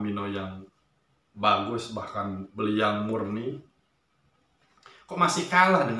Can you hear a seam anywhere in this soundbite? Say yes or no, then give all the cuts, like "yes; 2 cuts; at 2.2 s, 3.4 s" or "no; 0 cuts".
no; 0 cuts